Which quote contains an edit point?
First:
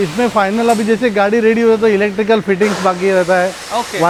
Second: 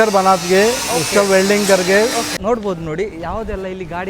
second; 1 cut; at 2.3 s

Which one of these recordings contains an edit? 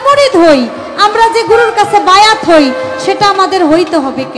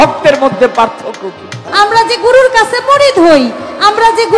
second; 1 cut; at 1.6 s

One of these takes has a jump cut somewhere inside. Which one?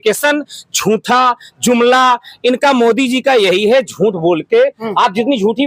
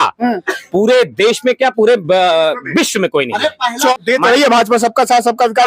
second; 1 cut; at 3.9 s

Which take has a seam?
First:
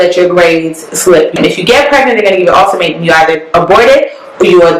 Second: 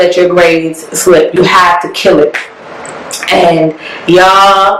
first; 1 cut; at 1.3 s

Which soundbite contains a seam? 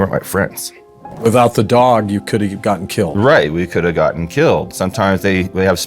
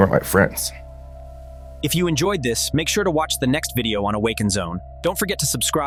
first; 2 cuts; at 1.1 s, 4.7 s

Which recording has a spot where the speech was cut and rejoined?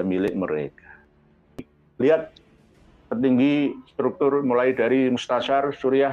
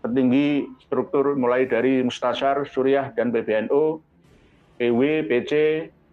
first; 1 cut; at 1.5 s

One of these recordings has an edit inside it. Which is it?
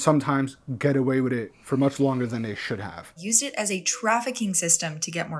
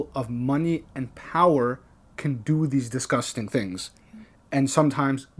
first; 1 cut; at 3.2 s

